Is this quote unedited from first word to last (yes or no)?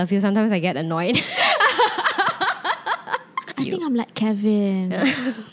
no